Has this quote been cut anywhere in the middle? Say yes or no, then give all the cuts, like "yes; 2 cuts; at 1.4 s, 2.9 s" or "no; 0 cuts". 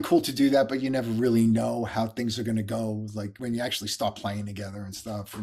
yes; 1 cut; at 3.4 s